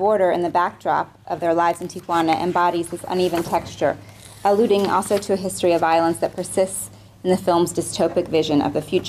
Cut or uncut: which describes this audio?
uncut